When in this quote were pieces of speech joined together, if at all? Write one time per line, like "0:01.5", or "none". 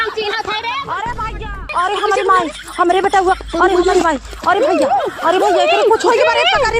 0:01.7